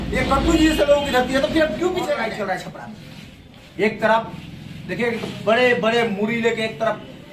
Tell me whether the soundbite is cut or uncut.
cut